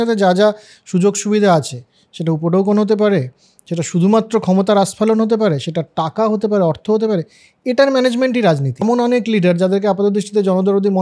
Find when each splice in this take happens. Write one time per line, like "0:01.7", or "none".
0:08.8